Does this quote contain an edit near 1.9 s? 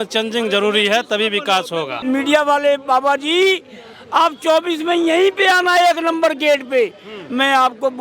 yes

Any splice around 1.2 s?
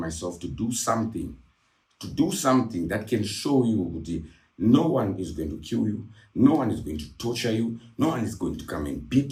no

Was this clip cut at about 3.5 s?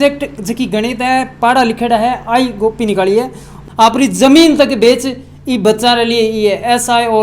yes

